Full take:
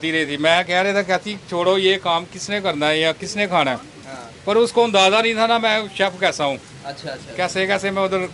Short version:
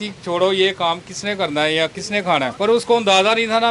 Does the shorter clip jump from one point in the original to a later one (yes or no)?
yes